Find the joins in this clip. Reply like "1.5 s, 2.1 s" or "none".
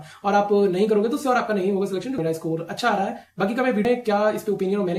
2.2 s, 3.8 s